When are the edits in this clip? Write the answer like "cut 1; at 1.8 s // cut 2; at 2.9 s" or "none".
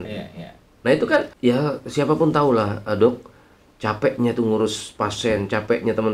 cut 1; at 1.3 s